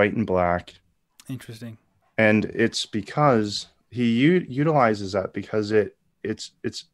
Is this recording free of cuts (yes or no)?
yes